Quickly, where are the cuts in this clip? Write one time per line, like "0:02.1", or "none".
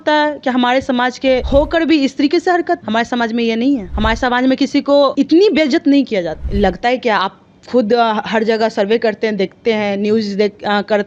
0:01.4
0:02.8
0:03.9
0:05.1
0:06.4